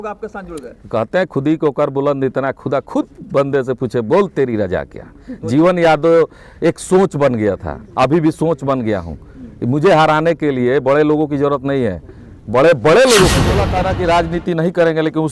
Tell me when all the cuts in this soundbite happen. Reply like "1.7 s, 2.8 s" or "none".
13.7 s